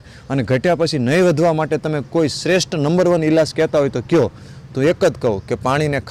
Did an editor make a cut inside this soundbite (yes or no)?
no